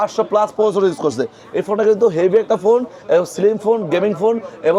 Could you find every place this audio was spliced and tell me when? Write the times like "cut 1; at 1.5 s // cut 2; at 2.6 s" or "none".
none